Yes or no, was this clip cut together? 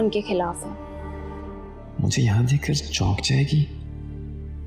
yes